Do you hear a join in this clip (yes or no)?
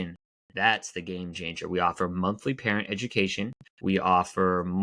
yes